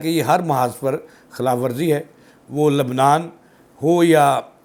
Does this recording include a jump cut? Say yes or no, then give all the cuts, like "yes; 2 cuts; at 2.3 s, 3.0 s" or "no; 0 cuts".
no; 0 cuts